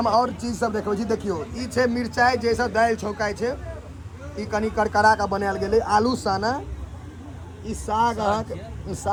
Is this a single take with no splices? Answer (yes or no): yes